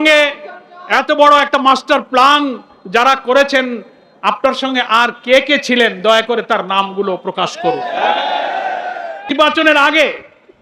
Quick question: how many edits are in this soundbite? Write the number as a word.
one